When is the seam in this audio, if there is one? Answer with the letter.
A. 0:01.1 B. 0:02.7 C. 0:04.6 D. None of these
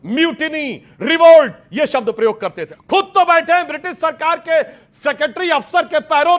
B